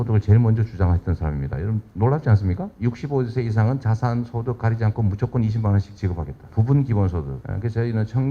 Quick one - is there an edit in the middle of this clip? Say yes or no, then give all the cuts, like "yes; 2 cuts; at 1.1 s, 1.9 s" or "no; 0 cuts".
yes; 3 cuts; at 2.7 s, 6.4 s, 7.4 s